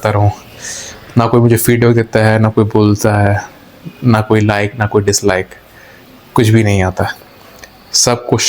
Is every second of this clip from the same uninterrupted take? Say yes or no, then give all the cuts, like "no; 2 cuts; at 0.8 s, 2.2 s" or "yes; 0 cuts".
yes; 0 cuts